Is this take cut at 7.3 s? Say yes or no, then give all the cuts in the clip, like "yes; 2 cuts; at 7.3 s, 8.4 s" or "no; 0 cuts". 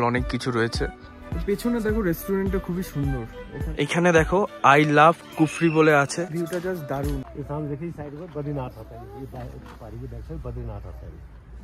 yes; 1 cut; at 7.3 s